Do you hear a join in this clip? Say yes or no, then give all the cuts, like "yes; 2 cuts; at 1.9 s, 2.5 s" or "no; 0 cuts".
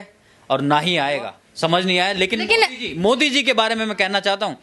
no; 0 cuts